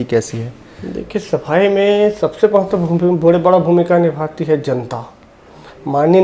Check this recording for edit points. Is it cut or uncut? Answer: uncut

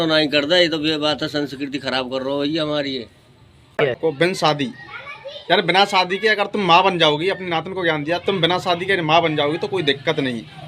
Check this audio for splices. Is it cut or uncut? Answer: cut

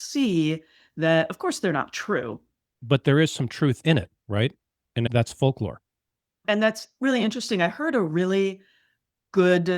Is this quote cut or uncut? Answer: cut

